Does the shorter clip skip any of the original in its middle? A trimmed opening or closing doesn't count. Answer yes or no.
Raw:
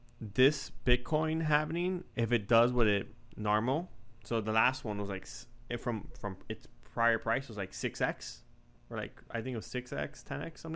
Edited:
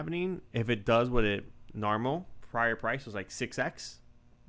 yes